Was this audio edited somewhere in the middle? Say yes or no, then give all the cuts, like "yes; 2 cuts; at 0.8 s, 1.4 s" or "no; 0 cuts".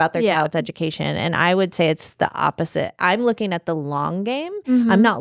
yes; 1 cut; at 3.0 s